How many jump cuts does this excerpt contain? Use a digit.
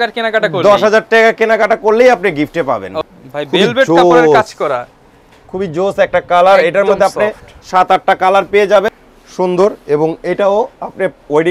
2